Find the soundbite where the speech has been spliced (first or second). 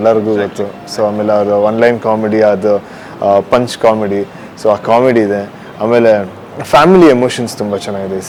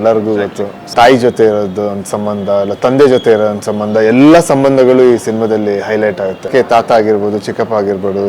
second